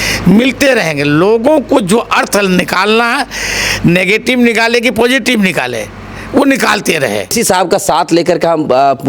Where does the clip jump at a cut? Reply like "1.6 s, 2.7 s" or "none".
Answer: 7.3 s